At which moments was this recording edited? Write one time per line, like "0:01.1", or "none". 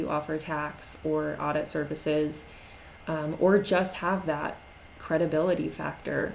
none